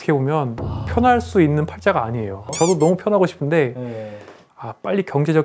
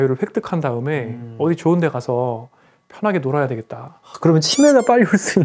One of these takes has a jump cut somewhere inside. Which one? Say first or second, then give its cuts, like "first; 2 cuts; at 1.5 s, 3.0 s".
first; 2 cuts; at 2.5 s, 4.5 s